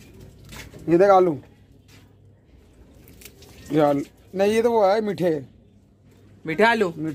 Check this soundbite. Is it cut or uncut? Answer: uncut